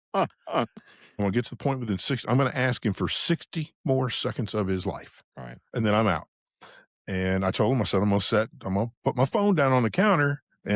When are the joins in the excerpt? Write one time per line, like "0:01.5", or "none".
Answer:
0:01.2